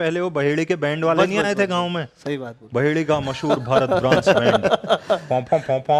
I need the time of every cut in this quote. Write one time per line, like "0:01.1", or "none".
none